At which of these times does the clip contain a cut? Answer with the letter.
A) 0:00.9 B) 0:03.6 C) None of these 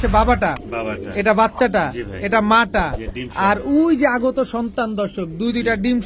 C